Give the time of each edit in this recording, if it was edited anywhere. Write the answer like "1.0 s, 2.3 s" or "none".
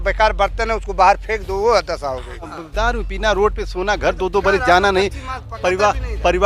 2.6 s